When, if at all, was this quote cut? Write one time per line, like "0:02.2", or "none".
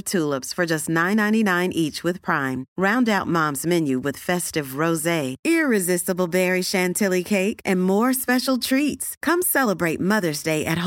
none